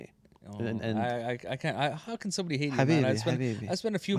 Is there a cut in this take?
no; 0 cuts

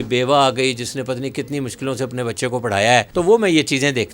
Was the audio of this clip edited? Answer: yes; 1 cut; at 3.1 s

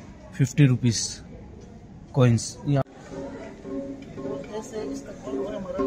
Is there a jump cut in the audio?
yes; 1 cut; at 2.8 s

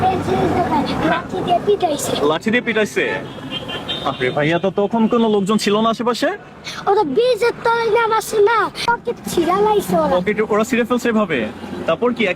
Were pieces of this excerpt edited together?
yes; 1 cut; at 8.9 s

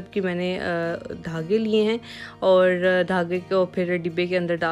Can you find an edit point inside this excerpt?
no; 0 cuts

